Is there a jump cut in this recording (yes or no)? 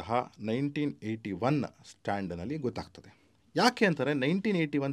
no